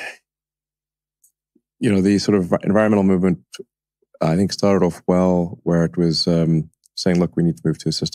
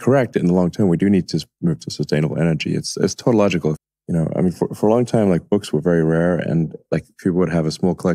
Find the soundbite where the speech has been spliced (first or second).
second